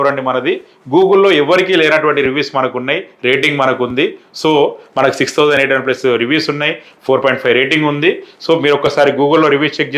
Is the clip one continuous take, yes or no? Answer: yes